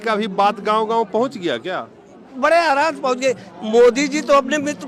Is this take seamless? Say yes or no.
yes